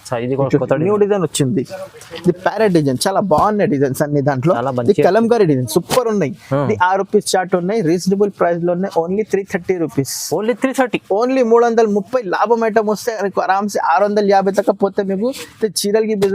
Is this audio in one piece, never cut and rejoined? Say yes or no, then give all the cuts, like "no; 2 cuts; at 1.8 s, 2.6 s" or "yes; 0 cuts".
yes; 0 cuts